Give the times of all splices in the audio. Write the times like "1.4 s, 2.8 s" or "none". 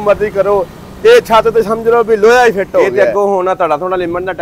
2.9 s